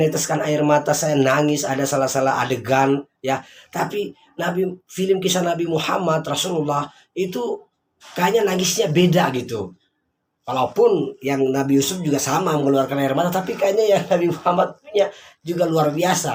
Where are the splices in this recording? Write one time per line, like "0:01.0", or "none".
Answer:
none